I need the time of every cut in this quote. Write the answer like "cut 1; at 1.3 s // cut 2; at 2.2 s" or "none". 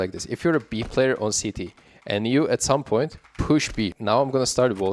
cut 1; at 4.0 s